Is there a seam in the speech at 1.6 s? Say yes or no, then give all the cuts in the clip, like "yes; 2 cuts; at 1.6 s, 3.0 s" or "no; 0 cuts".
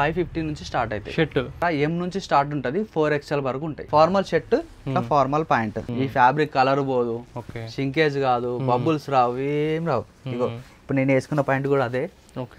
yes; 3 cuts; at 1.6 s, 3.8 s, 5.8 s